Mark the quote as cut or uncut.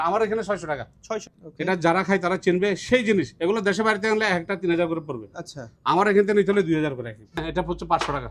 cut